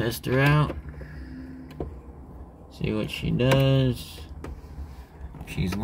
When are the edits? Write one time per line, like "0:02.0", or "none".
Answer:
none